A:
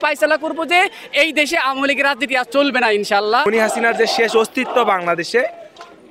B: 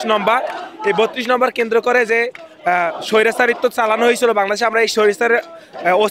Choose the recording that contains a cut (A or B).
A